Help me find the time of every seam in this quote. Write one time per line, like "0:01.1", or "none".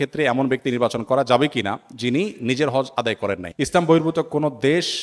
0:03.5